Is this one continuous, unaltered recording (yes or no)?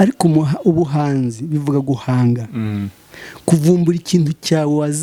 yes